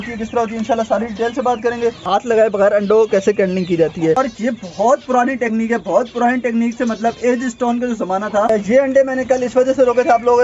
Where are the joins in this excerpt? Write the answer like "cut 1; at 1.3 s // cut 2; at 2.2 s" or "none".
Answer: cut 1; at 2.1 s // cut 2; at 4.2 s // cut 3; at 8.5 s